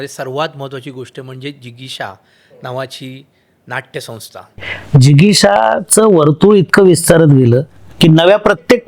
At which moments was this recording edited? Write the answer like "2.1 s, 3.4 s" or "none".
4.7 s